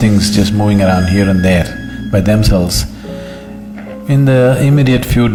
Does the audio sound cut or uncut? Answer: uncut